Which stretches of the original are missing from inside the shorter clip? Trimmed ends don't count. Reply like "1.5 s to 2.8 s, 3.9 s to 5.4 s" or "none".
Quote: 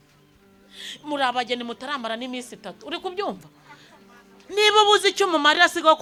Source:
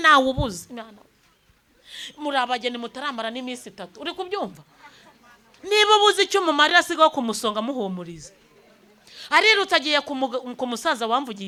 none